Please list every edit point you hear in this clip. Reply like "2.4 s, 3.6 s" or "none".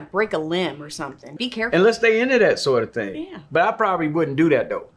1.3 s